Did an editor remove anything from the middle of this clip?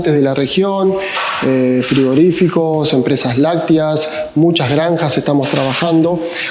no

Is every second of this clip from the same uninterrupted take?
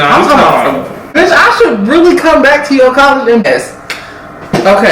no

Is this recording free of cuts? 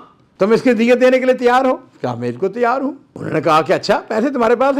no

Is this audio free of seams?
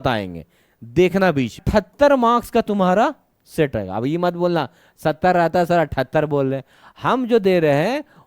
no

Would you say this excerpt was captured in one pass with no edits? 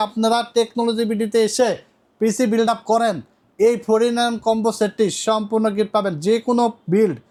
yes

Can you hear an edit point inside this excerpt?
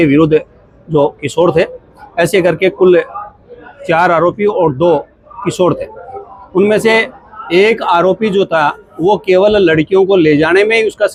no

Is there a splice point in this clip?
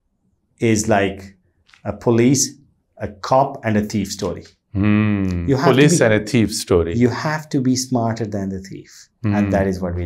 no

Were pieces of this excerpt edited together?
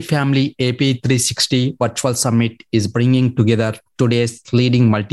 no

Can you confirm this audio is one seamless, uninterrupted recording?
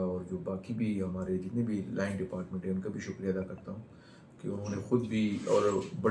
yes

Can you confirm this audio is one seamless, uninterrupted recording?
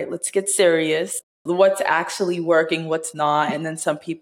no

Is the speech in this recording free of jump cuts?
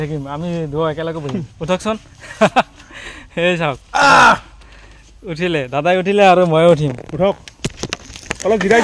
yes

